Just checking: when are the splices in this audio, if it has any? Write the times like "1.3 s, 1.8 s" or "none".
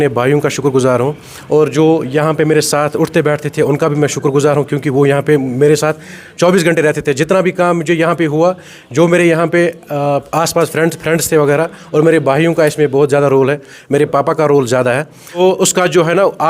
15.4 s